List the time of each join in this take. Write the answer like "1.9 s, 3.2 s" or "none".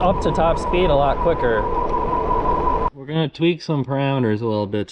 2.9 s